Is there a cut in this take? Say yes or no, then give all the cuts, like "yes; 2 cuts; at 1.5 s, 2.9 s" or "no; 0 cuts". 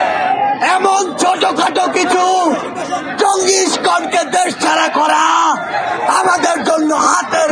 no; 0 cuts